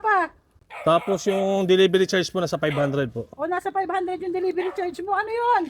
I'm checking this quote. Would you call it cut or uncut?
uncut